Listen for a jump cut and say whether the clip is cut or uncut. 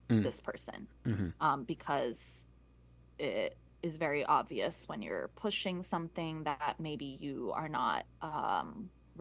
uncut